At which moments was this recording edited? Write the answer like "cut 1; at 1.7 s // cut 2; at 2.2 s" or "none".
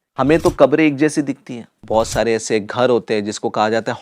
cut 1; at 1.8 s